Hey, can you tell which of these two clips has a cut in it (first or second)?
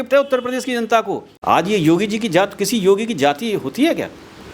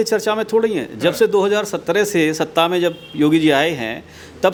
first